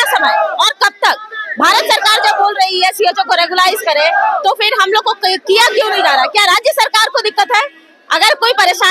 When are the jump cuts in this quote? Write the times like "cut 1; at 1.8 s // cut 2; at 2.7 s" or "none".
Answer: none